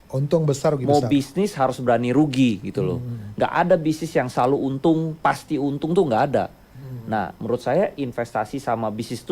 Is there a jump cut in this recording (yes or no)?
no